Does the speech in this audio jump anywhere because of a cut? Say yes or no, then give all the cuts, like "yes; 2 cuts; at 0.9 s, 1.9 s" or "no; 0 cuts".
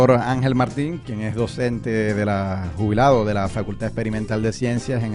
no; 0 cuts